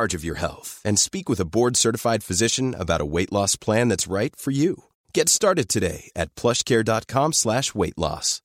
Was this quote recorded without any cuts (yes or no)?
yes